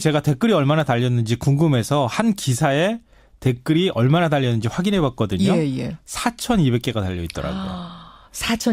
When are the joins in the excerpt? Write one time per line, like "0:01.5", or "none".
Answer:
none